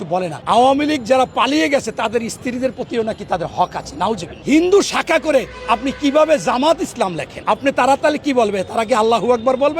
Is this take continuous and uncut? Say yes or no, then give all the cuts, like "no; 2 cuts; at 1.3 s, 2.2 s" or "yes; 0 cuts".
no; 1 cut; at 4.3 s